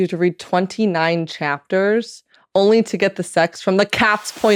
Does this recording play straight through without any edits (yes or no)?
yes